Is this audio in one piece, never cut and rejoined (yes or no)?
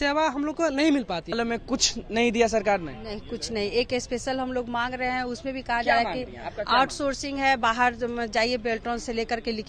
no